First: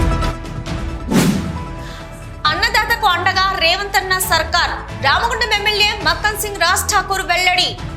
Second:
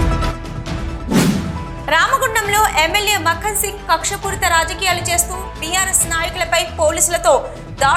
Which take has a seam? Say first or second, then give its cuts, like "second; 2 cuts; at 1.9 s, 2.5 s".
first; 1 cut; at 1.6 s